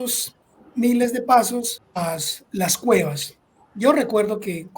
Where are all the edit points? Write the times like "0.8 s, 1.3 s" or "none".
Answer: 1.8 s